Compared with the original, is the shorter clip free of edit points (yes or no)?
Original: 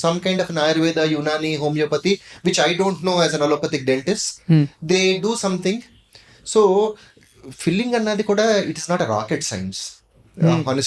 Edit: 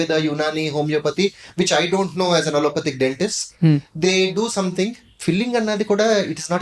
no